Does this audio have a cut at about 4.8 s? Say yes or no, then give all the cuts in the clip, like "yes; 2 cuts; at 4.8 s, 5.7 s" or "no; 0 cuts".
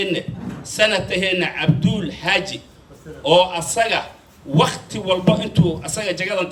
no; 0 cuts